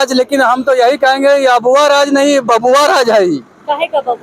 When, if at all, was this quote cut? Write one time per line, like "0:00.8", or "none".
none